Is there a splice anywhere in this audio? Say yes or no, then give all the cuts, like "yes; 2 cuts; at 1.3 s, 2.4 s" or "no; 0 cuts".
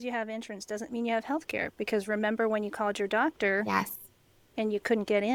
no; 0 cuts